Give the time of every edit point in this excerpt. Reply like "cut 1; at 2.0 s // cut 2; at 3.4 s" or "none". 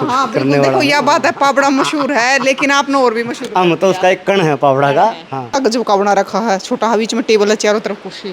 cut 1; at 5.5 s